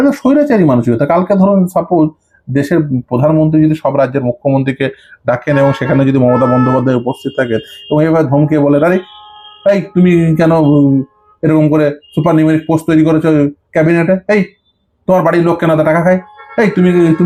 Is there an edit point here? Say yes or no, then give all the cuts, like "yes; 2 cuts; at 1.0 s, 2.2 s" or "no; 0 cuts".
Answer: no; 0 cuts